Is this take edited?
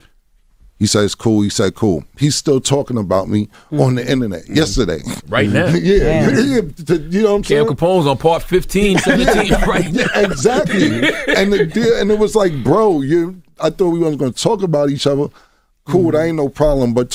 no; 0 cuts

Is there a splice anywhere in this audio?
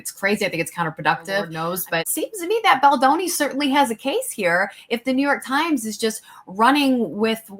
yes; 1 cut; at 1.5 s

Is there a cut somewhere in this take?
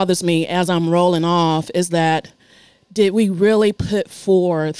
no; 0 cuts

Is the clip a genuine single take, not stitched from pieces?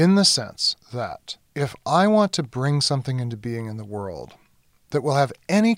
no; 1 cut; at 0.9 s

